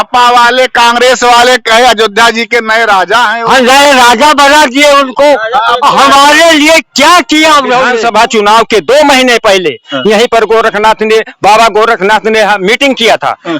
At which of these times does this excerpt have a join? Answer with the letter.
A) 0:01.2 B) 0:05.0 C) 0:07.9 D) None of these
C